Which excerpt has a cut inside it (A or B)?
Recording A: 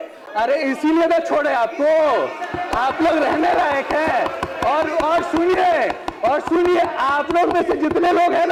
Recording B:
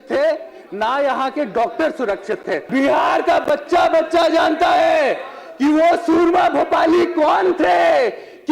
B